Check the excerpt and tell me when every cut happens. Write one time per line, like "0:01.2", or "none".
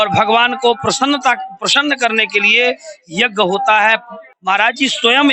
0:04.3